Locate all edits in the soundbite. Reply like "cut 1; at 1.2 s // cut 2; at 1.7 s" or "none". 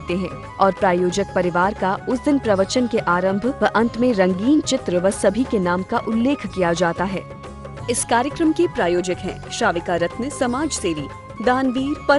cut 1; at 7.2 s

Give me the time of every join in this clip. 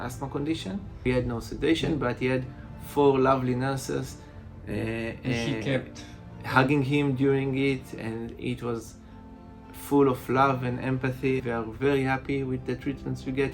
cut 1; at 1.1 s // cut 2; at 11.4 s

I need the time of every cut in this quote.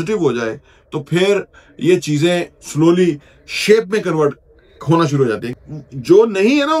cut 1; at 5.5 s

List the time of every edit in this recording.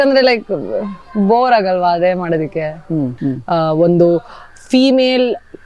cut 1; at 3.1 s

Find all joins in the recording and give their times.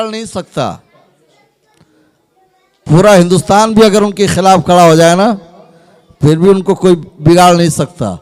none

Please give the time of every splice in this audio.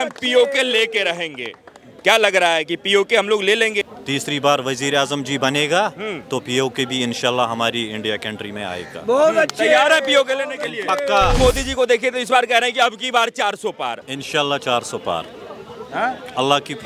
cut 1; at 3.8 s // cut 2; at 11.4 s // cut 3; at 14.1 s

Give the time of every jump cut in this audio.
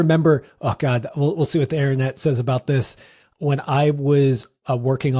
cut 1; at 3.2 s

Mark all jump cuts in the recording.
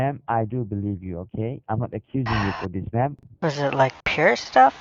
cut 1; at 3.2 s

